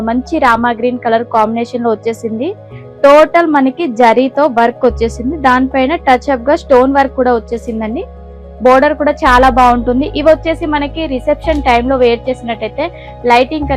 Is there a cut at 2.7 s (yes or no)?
no